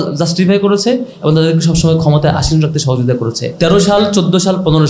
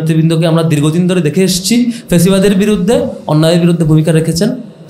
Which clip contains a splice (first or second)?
first